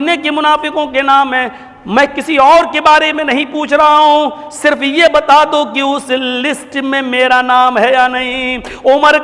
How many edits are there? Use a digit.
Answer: 0